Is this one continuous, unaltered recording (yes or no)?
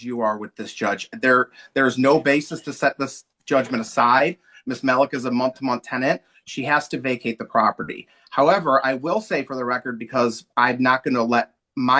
yes